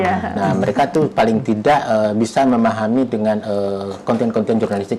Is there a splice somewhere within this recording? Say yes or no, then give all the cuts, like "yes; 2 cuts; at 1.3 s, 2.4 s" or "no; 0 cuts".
no; 0 cuts